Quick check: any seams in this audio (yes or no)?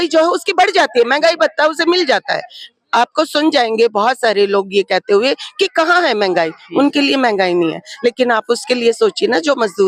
no